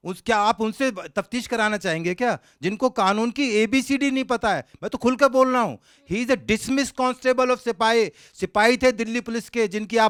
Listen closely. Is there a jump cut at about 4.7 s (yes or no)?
no